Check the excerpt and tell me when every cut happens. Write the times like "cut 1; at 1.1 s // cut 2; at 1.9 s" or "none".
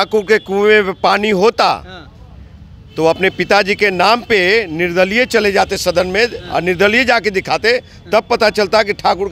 none